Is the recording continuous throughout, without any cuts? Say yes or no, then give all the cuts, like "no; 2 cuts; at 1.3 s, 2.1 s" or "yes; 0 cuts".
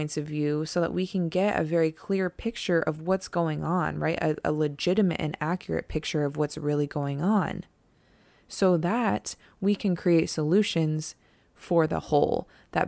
yes; 0 cuts